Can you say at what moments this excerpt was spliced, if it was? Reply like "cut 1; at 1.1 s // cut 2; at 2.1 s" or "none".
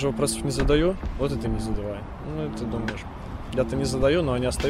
none